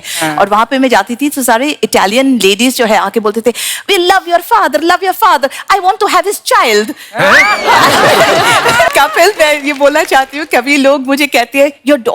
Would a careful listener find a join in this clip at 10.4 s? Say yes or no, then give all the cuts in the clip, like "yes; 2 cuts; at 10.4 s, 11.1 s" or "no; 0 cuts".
no; 1 cut; at 8.9 s